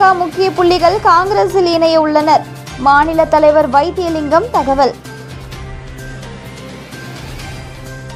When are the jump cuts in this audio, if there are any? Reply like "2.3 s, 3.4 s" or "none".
none